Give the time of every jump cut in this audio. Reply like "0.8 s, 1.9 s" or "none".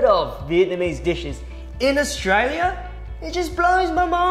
none